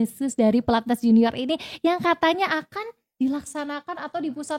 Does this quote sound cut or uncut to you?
uncut